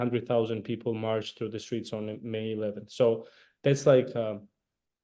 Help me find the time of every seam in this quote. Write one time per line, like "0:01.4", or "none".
none

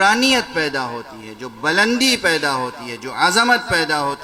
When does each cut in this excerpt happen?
none

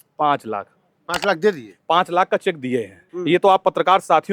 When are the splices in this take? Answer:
0:03.1

